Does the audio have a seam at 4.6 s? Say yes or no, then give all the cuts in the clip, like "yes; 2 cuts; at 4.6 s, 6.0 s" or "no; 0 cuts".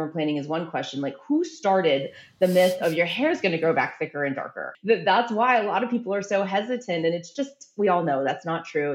yes; 1 cut; at 4.6 s